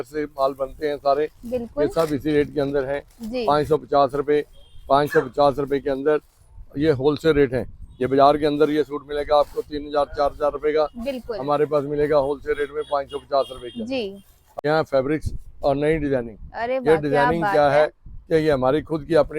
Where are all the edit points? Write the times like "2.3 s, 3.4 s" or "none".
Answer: 14.4 s